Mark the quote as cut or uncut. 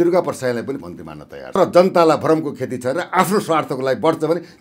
uncut